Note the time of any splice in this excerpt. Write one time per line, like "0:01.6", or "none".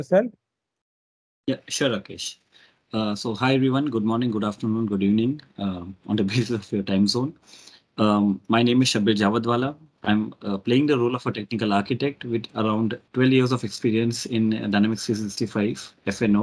0:13.0